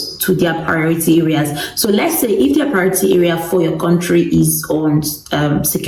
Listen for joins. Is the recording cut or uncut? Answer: uncut